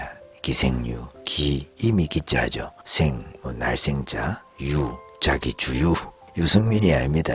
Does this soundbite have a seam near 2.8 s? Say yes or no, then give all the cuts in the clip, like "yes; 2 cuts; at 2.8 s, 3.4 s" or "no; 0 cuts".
yes; 2 cuts; at 2.8 s, 5.1 s